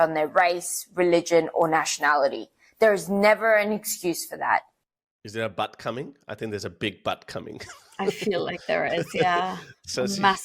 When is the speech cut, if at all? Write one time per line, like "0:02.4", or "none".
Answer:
none